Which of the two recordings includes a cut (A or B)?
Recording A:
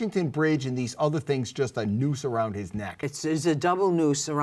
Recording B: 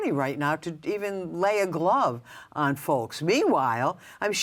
A